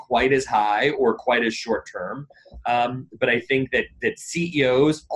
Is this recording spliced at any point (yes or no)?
no